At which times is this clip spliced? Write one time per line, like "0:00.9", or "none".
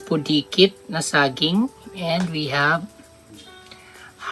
none